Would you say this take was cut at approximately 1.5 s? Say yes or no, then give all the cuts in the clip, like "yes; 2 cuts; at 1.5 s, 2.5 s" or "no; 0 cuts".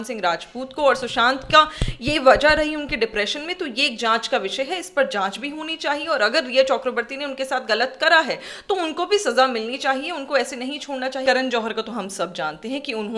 no; 1 cut; at 11.2 s